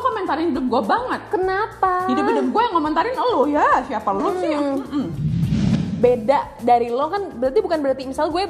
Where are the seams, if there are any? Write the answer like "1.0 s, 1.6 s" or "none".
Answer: 5.3 s